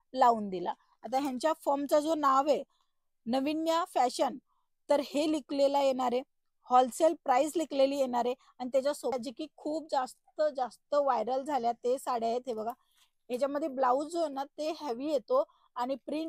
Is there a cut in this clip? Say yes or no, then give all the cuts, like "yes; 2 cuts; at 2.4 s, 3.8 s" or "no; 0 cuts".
yes; 1 cut; at 9.1 s